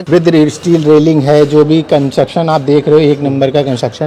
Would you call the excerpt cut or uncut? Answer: uncut